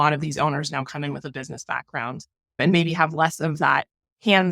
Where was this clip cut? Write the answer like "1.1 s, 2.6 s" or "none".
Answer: 2.6 s